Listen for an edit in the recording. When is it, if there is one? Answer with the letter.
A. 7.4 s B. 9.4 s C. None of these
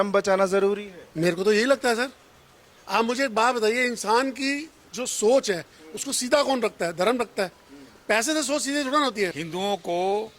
B